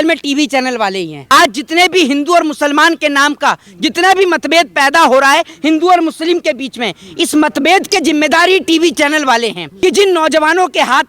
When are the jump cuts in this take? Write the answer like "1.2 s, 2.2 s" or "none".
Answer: 1.2 s, 9.6 s